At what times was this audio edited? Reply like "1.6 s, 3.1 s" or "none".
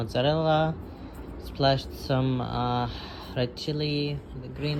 none